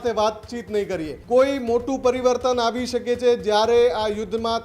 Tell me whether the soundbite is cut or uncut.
cut